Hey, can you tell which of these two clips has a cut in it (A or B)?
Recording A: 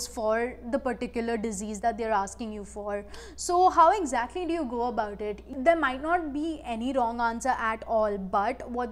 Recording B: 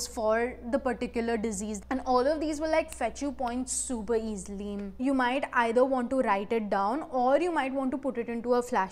B